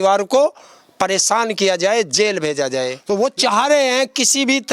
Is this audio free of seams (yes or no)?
no